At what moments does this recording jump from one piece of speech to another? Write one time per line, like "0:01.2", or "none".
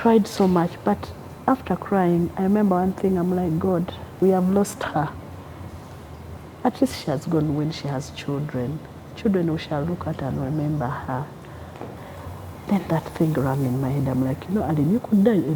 0:04.1
0:12.0

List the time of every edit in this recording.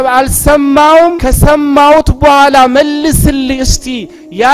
0:01.2

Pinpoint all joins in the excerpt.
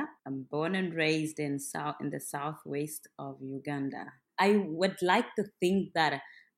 none

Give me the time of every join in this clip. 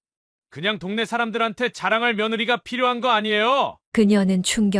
none

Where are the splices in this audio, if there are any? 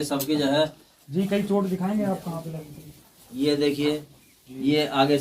none

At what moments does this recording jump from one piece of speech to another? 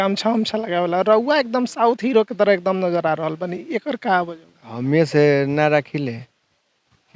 none

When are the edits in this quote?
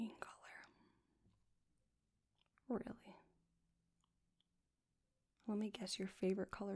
none

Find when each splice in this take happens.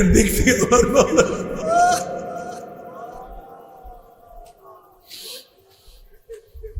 none

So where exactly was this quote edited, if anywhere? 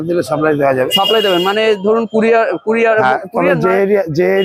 none

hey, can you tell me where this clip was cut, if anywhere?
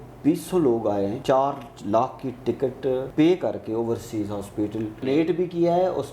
0:01.2
0:03.1
0:05.0

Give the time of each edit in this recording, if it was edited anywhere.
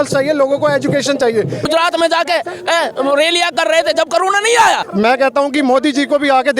0:01.7
0:04.9

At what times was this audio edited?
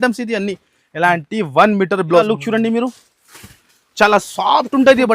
0:02.2

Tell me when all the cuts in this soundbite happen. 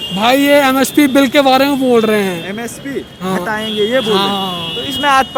none

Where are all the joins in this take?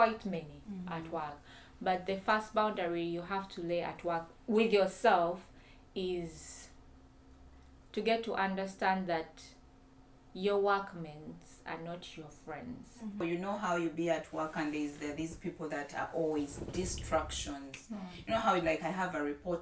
0:13.2

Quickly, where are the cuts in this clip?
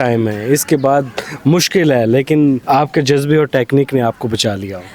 none

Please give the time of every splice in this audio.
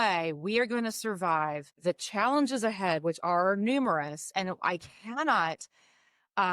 0:01.7

